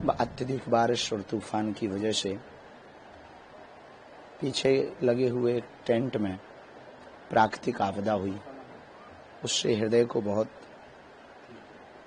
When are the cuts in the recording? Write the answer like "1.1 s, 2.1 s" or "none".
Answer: none